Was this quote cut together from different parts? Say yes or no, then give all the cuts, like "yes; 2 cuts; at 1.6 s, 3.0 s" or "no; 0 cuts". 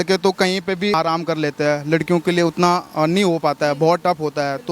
yes; 1 cut; at 0.9 s